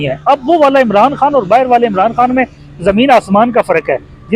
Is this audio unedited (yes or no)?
yes